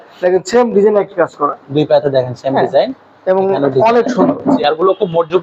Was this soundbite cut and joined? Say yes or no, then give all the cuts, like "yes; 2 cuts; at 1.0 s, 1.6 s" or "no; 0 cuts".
no; 0 cuts